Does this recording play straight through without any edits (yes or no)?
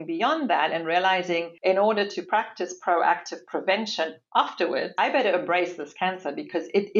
no